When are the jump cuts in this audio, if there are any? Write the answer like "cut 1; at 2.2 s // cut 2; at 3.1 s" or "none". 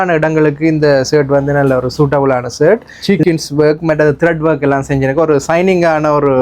cut 1; at 2.9 s